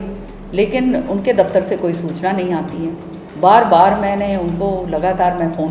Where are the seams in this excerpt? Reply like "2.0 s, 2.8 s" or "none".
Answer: none